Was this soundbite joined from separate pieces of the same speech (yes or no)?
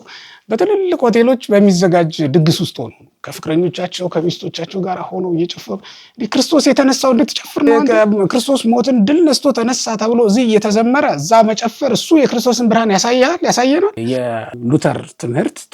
yes